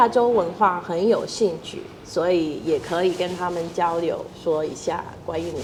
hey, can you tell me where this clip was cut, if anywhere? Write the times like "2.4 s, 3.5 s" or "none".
none